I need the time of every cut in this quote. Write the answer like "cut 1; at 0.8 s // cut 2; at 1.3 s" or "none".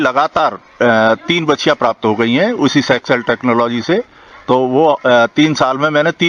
none